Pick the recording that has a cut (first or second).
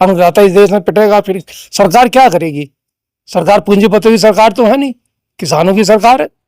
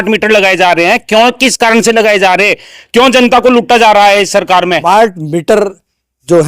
second